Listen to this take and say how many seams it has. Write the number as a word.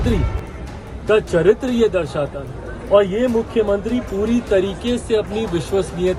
zero